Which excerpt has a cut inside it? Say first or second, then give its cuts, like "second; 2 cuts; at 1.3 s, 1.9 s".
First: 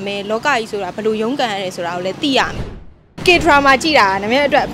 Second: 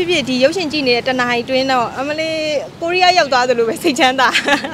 first; 1 cut; at 3.1 s